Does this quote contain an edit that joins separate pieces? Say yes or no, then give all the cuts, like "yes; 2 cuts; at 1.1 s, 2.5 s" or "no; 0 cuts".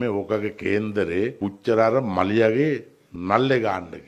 yes; 1 cut; at 1.3 s